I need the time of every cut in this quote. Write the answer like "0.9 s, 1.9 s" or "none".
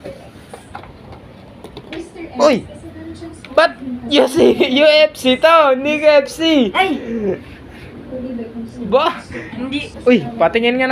9.9 s